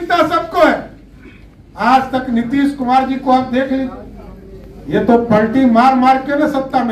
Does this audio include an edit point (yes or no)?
no